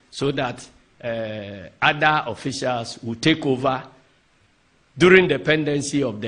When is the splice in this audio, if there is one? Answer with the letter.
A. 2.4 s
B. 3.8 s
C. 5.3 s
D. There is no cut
A